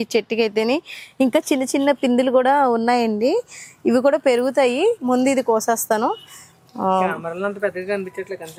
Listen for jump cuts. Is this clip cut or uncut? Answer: uncut